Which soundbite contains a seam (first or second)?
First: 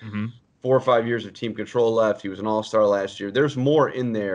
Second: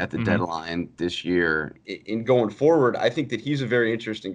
second